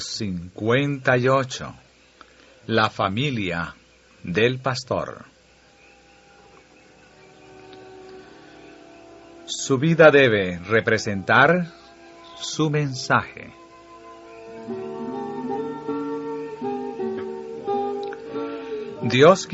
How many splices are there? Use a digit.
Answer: 1